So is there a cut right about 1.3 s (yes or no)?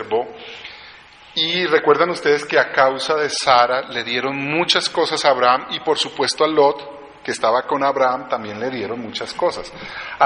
yes